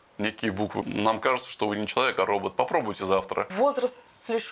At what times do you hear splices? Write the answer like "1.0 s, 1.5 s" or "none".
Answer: 0.8 s, 3.5 s